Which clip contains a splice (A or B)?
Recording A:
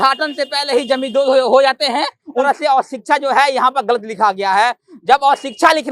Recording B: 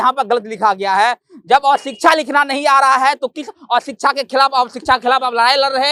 A